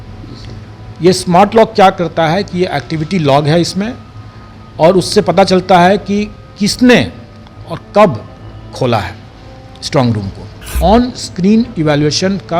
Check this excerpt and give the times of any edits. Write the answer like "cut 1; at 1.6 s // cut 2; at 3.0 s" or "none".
cut 1; at 10.6 s